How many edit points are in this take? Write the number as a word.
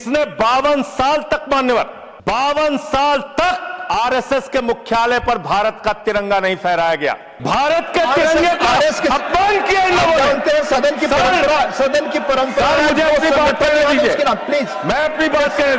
three